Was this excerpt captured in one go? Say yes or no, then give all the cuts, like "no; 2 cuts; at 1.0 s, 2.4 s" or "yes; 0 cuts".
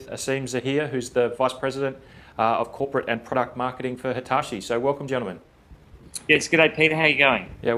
yes; 0 cuts